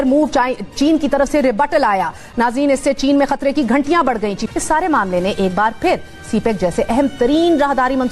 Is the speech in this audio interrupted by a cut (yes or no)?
yes